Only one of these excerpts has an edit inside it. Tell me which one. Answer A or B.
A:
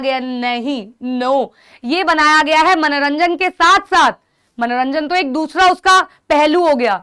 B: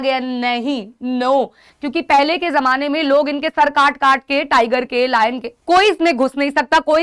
B